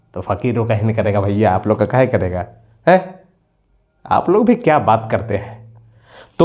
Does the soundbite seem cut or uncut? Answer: uncut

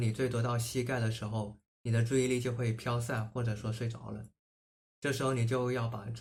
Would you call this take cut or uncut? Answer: uncut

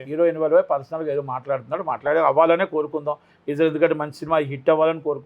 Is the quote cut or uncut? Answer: uncut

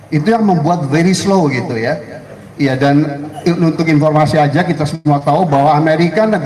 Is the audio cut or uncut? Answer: uncut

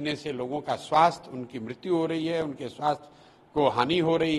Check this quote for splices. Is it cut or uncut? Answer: uncut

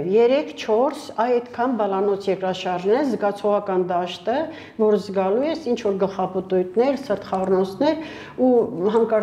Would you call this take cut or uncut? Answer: uncut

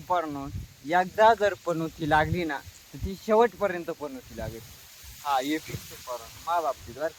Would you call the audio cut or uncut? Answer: uncut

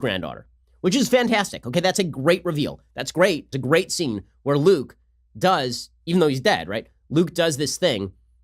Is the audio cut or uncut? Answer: cut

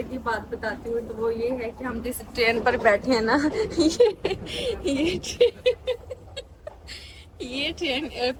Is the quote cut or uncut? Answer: uncut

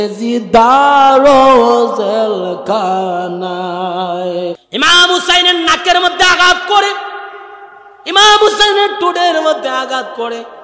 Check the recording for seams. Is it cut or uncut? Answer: cut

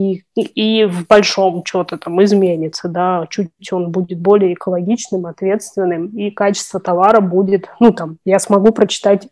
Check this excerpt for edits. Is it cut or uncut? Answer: uncut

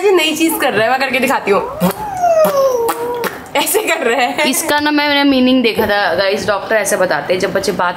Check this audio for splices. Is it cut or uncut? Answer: uncut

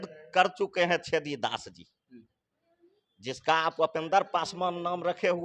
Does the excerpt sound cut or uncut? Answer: uncut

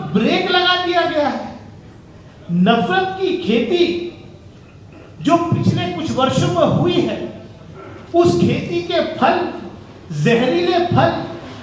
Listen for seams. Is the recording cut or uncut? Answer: uncut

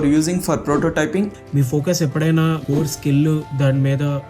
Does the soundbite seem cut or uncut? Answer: cut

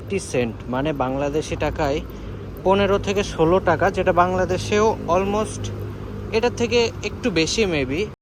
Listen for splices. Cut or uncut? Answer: uncut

